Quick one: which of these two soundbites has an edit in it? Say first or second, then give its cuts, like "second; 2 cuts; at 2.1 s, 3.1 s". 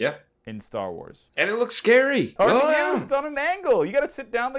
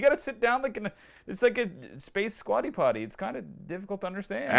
first; 2 cuts; at 1.2 s, 2.3 s